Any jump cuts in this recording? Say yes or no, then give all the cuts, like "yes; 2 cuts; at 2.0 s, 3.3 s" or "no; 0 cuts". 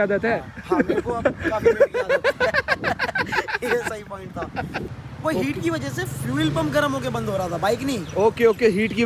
yes; 1 cut; at 4.8 s